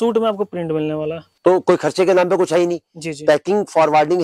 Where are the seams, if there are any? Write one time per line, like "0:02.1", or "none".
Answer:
0:01.2